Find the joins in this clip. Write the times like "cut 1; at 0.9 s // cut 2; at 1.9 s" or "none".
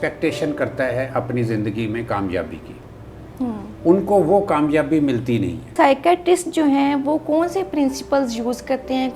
cut 1; at 5.7 s